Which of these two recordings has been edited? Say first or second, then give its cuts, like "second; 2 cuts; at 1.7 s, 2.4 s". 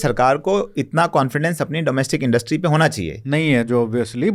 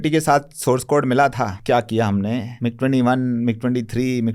second; 2 cuts; at 1.6 s, 2.5 s